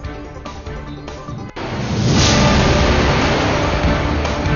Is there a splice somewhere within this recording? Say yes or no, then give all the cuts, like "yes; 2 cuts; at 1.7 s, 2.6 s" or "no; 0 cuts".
yes; 1 cut; at 1.5 s